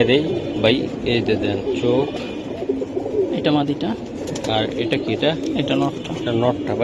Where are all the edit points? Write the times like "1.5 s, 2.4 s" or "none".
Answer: none